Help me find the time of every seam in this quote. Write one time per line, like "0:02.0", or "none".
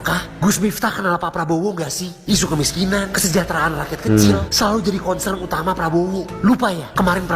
none